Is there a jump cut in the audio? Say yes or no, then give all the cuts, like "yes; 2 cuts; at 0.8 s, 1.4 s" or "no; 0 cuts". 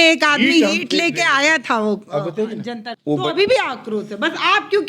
yes; 1 cut; at 2.9 s